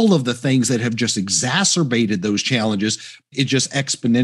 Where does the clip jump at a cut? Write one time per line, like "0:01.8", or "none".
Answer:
0:03.3